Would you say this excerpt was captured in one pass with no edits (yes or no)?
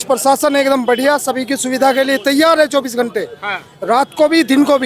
yes